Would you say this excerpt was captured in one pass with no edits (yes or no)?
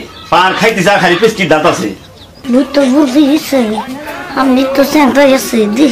no